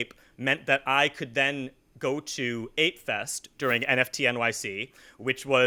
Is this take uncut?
yes; 0 cuts

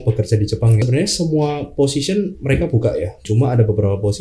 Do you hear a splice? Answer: yes; 2 cuts; at 0.8 s, 3.2 s

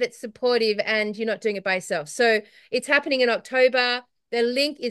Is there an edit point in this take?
no; 0 cuts

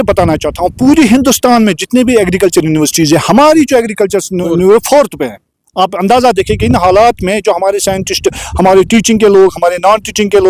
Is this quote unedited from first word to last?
yes; 0 cuts

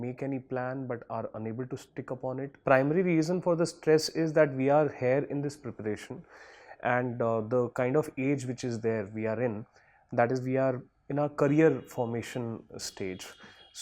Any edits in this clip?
yes; 1 cut; at 2.5 s

